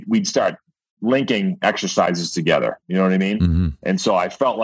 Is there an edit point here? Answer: no; 0 cuts

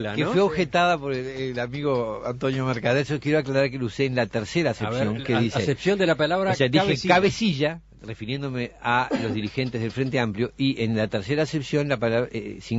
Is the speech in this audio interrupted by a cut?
yes; 1 cut; at 7.8 s

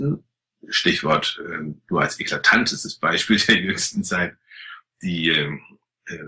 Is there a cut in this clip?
yes; 1 cut; at 2.8 s

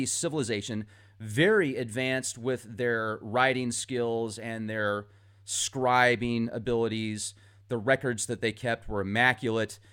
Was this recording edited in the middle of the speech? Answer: yes; 1 cut; at 2.3 s

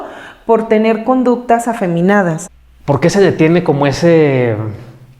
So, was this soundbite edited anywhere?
yes; 1 cut; at 2.5 s

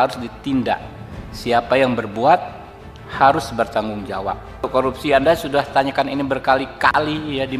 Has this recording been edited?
yes; 1 cut; at 4.7 s

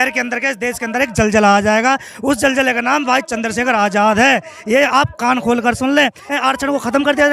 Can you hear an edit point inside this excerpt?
yes; 1 cut; at 6.2 s

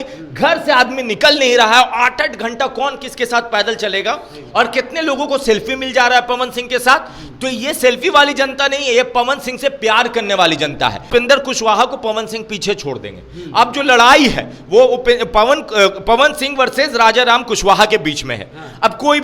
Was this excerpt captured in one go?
no; 1 cut; at 11.0 s

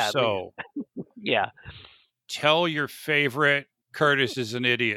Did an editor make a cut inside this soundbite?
no; 0 cuts

